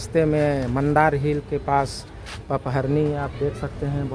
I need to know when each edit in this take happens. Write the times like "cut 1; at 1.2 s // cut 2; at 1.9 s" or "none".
none